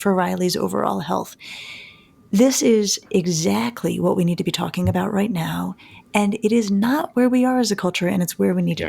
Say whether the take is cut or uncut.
cut